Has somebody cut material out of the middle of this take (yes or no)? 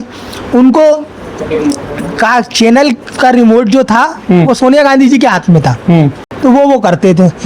yes